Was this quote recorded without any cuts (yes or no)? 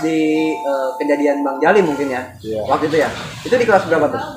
yes